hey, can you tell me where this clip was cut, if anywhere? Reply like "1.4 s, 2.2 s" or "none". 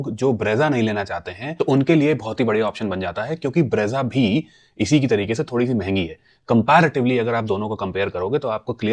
none